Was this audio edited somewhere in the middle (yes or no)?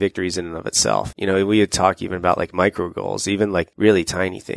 yes